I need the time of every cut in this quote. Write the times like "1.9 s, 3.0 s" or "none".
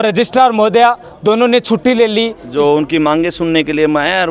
2.4 s